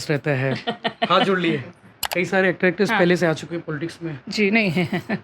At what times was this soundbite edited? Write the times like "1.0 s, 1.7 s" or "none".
2.0 s